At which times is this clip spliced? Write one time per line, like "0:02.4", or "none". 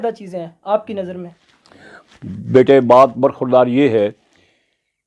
none